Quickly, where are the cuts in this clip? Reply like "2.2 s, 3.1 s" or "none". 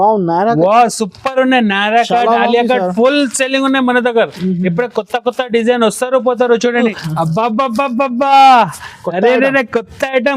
7.0 s

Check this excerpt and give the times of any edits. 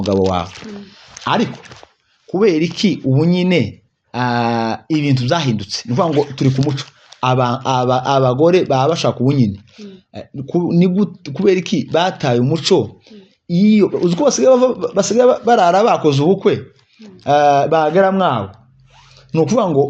none

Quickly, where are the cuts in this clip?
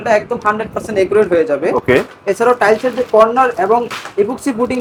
none

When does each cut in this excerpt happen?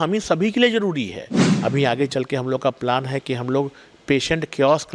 1.5 s

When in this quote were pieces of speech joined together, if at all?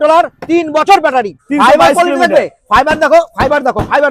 1.4 s

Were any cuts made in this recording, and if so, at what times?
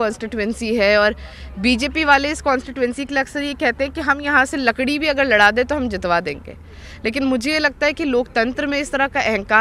none

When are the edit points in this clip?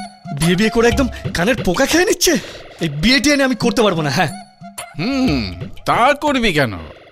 2.6 s

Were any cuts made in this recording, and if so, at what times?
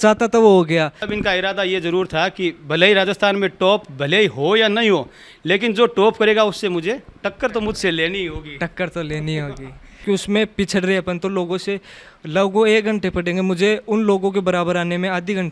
1.0 s, 9.9 s

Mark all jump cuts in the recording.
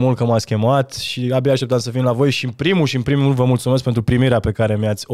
none

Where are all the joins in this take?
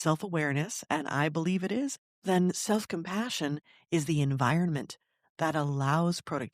2.0 s

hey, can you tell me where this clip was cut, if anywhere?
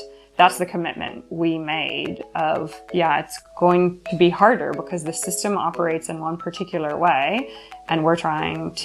none

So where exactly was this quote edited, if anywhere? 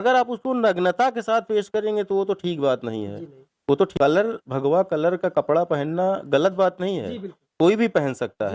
3.9 s

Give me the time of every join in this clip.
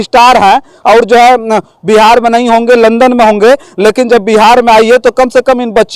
none

